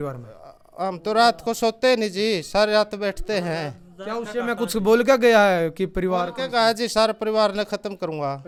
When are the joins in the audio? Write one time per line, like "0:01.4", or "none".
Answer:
none